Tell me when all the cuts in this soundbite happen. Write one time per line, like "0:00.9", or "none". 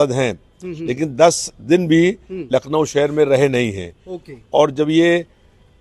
none

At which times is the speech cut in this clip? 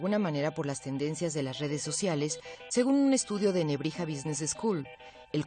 0:01.4

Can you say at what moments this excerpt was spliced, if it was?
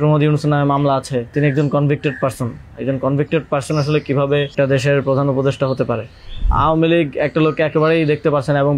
0:01.3
0:04.5
0:06.5

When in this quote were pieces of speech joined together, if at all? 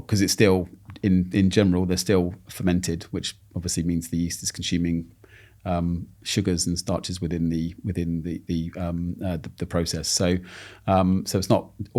none

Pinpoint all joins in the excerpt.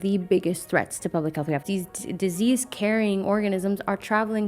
0:01.6

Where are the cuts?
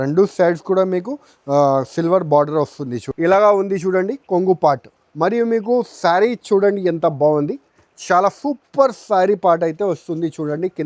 0:03.0

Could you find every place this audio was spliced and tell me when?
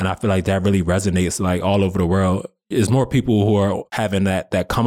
none

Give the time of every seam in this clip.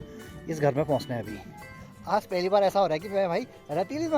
0:01.7

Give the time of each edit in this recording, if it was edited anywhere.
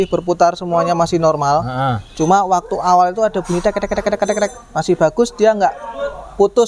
none

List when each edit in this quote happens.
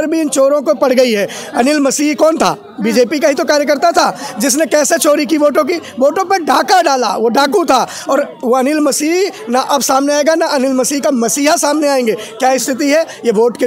none

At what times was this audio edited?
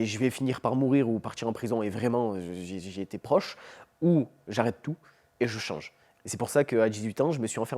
0:06.1

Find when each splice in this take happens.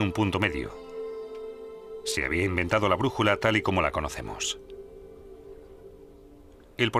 none

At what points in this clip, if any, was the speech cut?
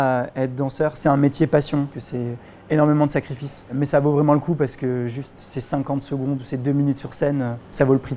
0:01.0
0:01.9
0:03.8

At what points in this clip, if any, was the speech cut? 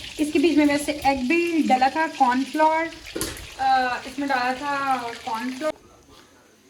0:05.7

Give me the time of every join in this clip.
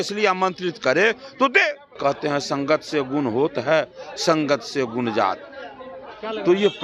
0:01.9

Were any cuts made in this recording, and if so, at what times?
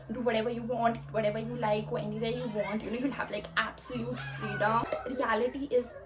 0:04.9

